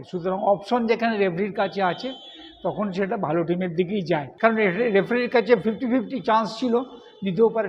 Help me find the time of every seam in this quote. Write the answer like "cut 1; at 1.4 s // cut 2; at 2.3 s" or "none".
cut 1; at 4.3 s